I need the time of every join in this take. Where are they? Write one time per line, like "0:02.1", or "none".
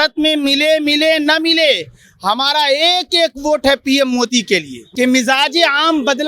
0:04.8